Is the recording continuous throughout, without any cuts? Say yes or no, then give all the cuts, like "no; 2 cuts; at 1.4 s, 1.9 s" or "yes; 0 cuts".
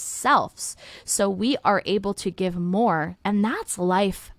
no; 1 cut; at 3.1 s